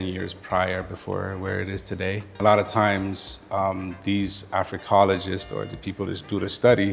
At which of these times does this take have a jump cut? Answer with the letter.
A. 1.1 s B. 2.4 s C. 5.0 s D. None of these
B